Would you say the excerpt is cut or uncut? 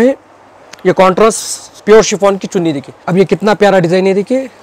cut